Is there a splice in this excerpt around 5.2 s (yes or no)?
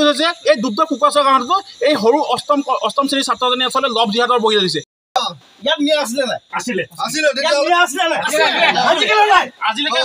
yes